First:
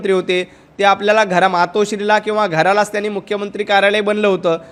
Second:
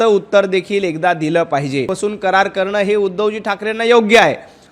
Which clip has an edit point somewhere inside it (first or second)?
second